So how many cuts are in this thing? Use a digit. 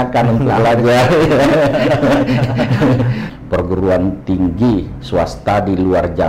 1